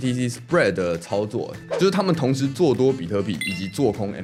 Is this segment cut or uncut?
uncut